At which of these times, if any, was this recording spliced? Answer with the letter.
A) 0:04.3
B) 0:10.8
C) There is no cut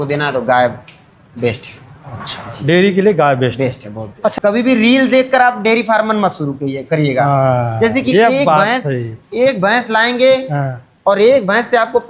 A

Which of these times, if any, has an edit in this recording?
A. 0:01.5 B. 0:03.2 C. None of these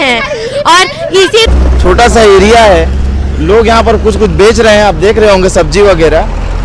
A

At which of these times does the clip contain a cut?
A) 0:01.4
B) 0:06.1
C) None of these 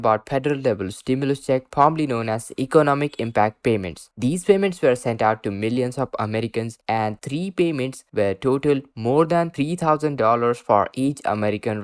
C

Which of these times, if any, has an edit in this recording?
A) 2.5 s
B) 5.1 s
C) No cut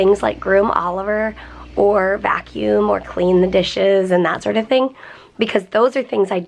C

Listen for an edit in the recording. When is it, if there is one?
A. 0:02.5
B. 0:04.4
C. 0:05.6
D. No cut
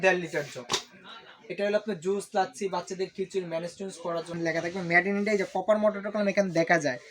B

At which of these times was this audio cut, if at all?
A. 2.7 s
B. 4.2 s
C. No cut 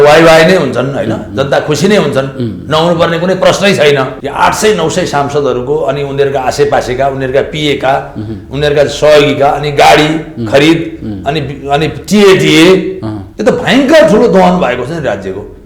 B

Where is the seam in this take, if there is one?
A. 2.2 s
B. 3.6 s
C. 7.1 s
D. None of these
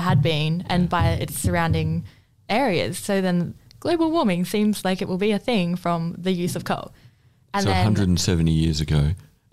B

